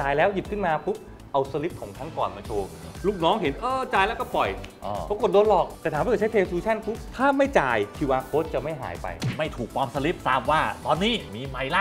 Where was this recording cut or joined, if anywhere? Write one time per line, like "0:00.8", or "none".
0:09.3
0:10.2

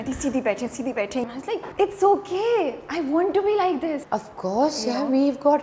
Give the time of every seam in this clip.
0:01.2
0:04.0

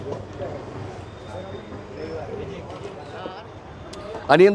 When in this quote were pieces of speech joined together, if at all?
0:03.1

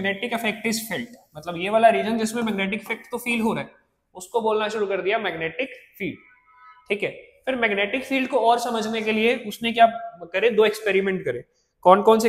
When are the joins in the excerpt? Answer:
none

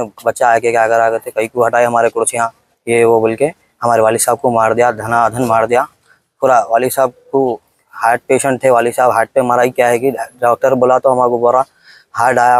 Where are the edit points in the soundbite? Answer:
none

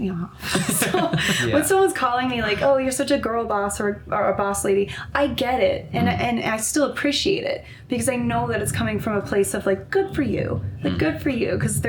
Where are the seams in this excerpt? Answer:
none

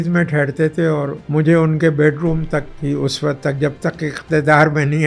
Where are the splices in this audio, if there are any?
0:01.2

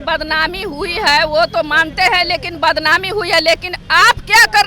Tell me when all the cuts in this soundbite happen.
none

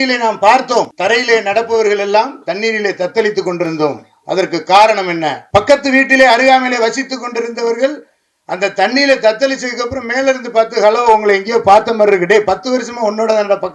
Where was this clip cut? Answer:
0:00.9
0:05.4

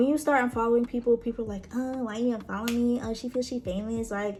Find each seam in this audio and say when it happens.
none

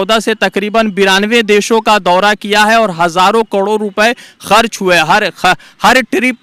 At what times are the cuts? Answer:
none

